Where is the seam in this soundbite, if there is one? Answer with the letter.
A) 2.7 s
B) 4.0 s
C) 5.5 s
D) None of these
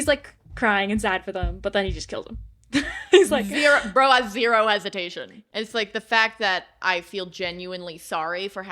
C